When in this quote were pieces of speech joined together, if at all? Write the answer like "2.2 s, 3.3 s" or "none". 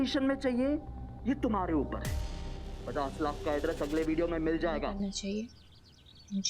5.0 s

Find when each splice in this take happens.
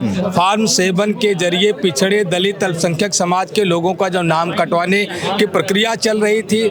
none

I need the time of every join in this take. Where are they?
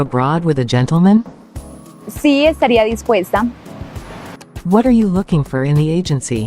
1.2 s

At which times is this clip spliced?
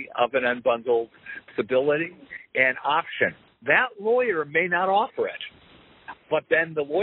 3.5 s

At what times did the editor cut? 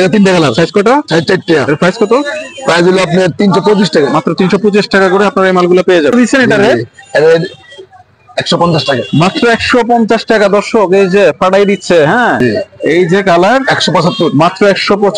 6.1 s, 12.4 s

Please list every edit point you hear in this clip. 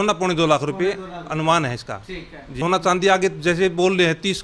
2.5 s

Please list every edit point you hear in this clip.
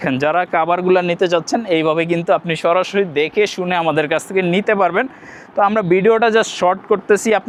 none

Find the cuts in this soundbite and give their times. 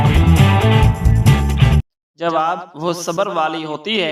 2.0 s

